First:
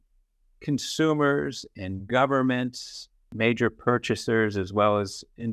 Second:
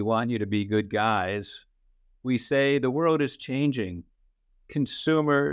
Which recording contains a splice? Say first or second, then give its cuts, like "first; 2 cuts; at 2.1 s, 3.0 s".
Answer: first; 1 cut; at 3.3 s